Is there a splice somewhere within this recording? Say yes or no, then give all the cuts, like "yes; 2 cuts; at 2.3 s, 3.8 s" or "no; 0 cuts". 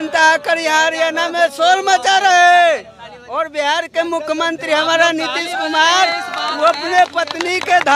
no; 0 cuts